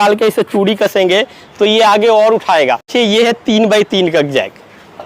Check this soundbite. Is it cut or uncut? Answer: cut